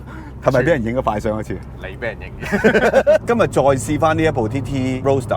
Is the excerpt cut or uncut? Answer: cut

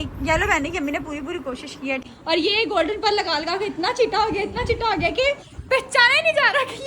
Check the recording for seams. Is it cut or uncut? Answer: cut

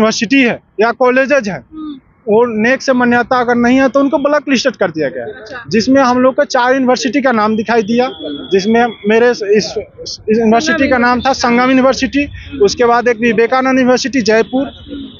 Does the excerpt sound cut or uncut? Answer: uncut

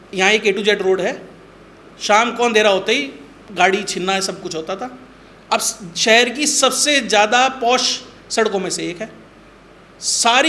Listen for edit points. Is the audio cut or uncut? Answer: uncut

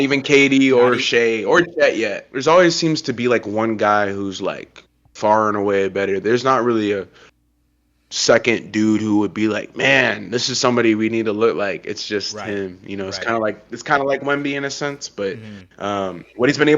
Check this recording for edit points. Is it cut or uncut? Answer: cut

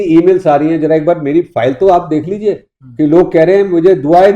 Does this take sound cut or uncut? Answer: uncut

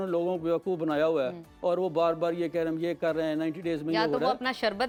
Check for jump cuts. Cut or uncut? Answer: uncut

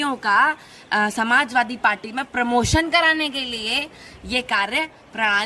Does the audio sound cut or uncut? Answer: uncut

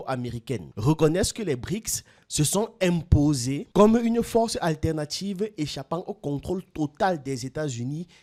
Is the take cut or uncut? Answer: uncut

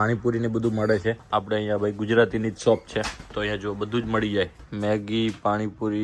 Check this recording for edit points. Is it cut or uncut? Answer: cut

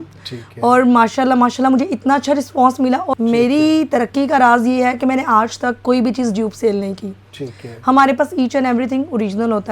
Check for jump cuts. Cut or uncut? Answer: cut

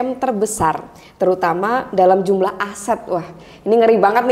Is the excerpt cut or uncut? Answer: uncut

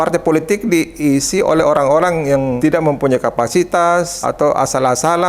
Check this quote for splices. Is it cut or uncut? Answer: cut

